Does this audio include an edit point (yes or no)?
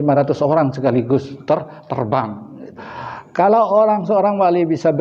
yes